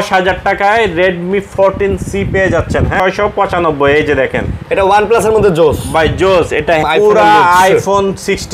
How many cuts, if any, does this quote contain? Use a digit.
2